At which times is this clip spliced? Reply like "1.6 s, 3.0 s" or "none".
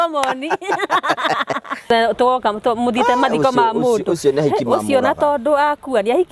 1.9 s

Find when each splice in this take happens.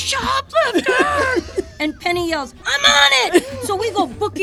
none

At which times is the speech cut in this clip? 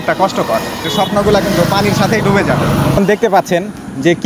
0.9 s, 3.0 s

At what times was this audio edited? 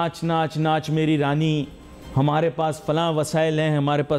none

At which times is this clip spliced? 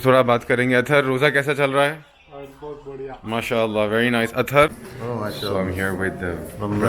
4.9 s

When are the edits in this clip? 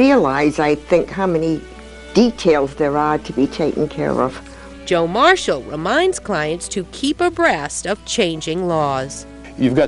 none

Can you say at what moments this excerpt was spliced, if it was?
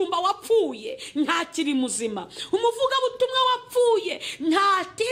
none

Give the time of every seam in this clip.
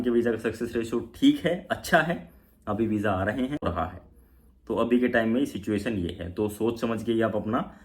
3.6 s

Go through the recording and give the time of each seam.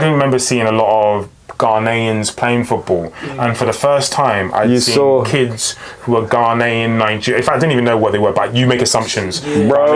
none

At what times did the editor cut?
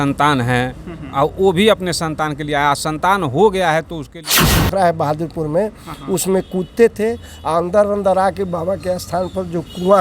4.3 s

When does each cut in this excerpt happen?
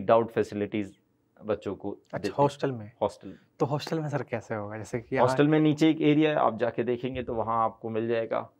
none

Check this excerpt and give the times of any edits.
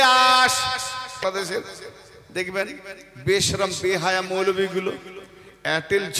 1.2 s

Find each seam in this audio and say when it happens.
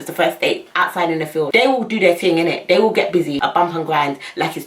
1.5 s, 3.4 s

